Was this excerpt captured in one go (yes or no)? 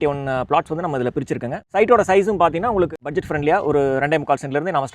no